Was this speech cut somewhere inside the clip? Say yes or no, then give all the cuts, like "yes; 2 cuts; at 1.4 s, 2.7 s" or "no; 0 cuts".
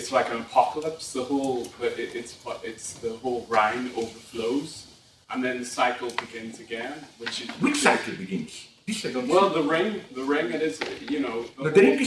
no; 0 cuts